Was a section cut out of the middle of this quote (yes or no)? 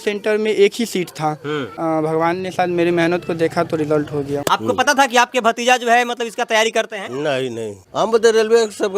yes